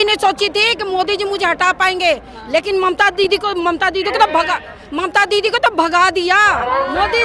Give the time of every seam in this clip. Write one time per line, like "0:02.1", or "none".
none